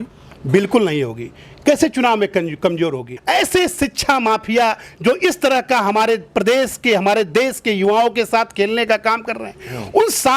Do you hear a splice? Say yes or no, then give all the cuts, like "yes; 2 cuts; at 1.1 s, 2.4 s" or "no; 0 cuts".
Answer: yes; 1 cut; at 3.1 s